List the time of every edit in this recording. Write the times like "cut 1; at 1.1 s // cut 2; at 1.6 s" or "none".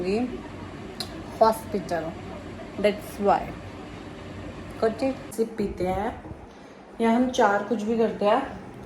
cut 1; at 5.3 s